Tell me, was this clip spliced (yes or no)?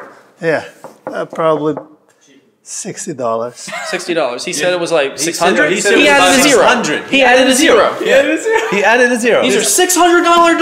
no